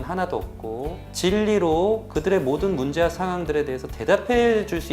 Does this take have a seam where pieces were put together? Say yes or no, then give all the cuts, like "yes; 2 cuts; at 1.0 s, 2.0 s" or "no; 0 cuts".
yes; 1 cut; at 1.0 s